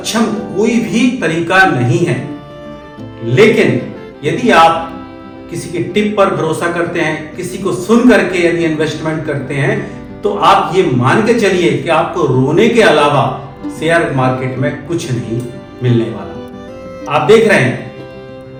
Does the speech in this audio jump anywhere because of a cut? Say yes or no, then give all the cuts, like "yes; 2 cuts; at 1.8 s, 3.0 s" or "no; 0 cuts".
no; 0 cuts